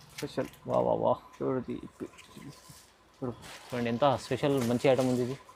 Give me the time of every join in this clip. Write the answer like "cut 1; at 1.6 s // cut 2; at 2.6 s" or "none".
none